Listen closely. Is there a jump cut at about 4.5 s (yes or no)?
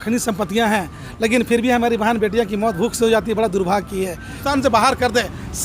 yes